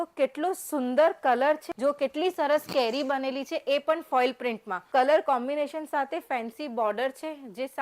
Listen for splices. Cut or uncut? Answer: cut